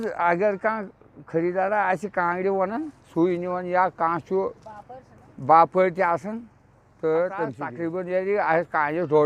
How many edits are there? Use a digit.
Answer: 1